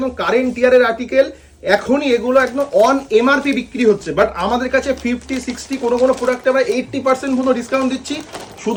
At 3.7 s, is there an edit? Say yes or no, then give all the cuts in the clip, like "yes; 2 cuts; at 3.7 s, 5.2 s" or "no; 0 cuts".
no; 0 cuts